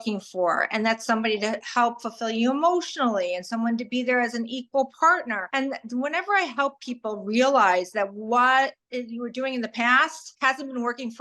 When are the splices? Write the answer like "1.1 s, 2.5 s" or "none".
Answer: 5.4 s, 10.2 s